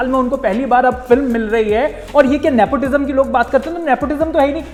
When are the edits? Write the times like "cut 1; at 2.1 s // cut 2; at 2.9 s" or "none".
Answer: none